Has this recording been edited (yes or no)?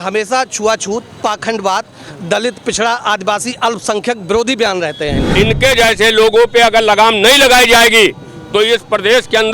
yes